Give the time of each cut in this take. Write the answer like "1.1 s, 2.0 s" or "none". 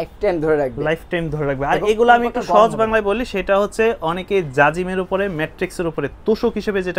none